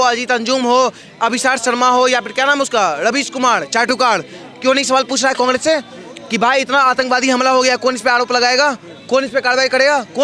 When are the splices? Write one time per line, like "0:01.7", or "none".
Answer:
none